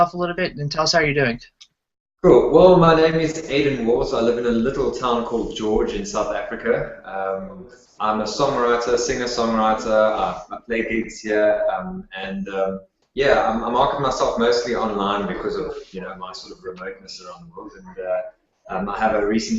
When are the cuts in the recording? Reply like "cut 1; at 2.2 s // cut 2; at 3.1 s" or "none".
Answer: cut 1; at 8.1 s